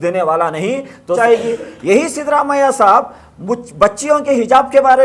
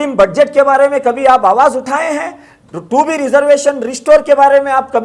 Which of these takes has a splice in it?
first; 1 cut; at 1.2 s

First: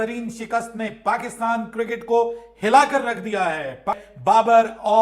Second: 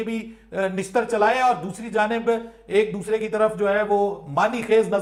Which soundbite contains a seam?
first; 1 cut; at 4.1 s

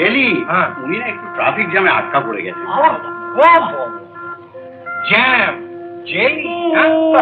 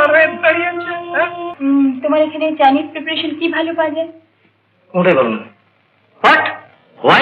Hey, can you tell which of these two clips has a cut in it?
second; 1 cut; at 1.4 s

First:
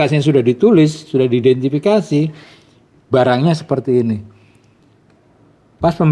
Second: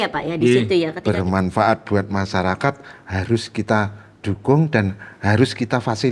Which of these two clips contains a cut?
second; 1 cut; at 1.0 s

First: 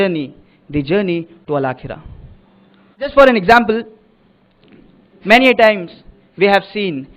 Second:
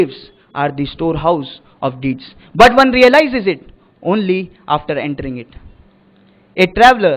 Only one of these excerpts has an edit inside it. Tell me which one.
first; 1 cut; at 3.1 s

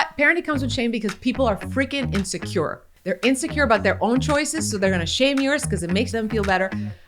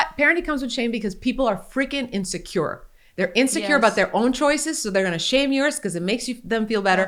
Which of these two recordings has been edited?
first; 2 cuts; at 2.9 s, 6.1 s

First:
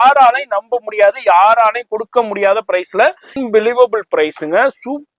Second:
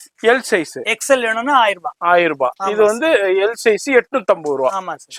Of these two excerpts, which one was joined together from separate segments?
first; 1 cut; at 3.3 s

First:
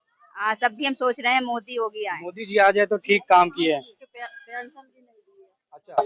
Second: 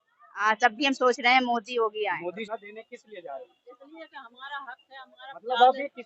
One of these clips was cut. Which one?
second; 1 cut; at 2.4 s

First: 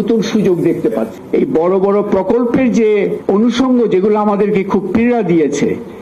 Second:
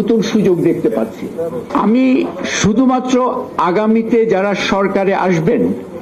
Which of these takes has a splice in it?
first; 2 cuts; at 1.2 s, 3.2 s

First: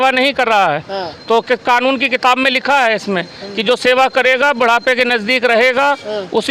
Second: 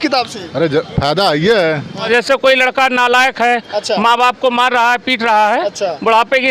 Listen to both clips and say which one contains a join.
second; 1 cut; at 2.1 s

